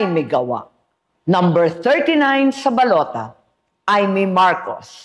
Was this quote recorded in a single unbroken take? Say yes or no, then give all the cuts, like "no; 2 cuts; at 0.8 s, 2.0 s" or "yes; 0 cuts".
no; 1 cut; at 4.0 s